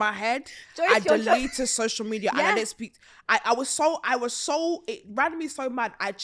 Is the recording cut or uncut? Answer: uncut